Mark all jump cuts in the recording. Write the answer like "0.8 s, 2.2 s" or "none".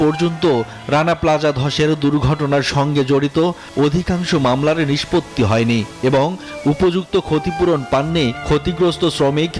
none